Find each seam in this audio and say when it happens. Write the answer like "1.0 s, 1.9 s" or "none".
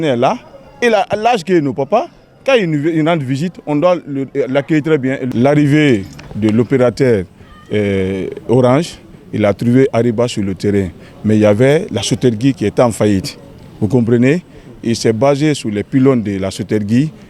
5.2 s